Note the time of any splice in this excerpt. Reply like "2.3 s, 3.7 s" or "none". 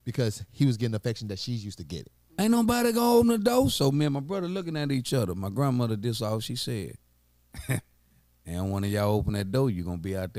2.2 s